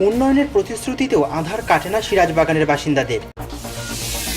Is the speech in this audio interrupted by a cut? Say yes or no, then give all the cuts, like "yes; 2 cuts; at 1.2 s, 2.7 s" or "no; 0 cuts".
yes; 1 cut; at 3.3 s